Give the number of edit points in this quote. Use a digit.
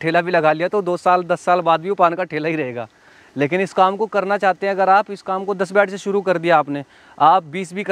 0